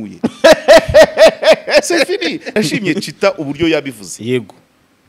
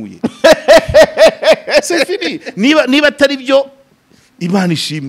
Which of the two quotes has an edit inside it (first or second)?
first